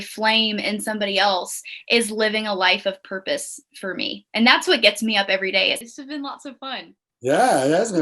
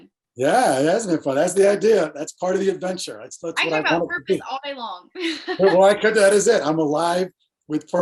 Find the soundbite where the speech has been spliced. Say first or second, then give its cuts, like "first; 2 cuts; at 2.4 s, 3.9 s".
first; 1 cut; at 5.8 s